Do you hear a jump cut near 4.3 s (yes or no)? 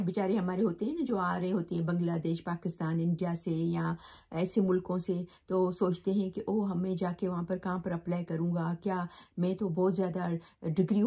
no